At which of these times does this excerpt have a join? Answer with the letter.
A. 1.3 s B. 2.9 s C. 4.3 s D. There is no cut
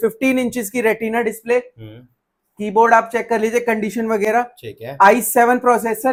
D